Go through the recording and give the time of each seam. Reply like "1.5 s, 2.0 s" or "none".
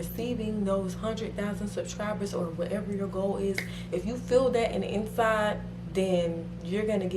none